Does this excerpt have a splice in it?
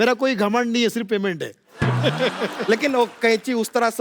no; 0 cuts

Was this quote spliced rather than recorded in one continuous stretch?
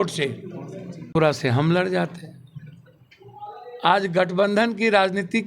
yes; 1 cut; at 1.1 s

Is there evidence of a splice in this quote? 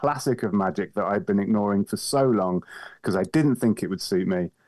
no; 0 cuts

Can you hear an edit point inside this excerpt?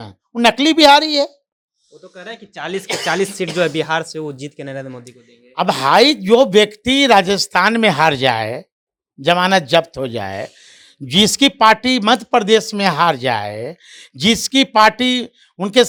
no; 0 cuts

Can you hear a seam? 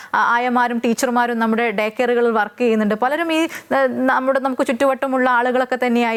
no; 0 cuts

